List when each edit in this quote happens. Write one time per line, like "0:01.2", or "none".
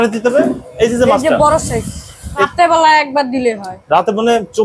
0:02.5